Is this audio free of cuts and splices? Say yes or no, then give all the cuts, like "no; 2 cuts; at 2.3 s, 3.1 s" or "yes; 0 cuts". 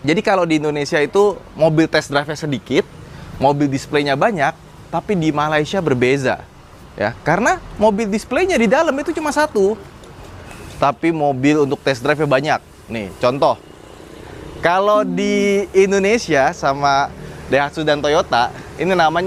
yes; 0 cuts